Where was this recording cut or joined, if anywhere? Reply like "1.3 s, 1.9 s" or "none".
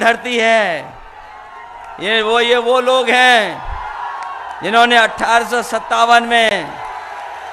none